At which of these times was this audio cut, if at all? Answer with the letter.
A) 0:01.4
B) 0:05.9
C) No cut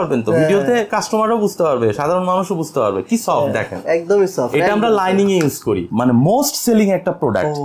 B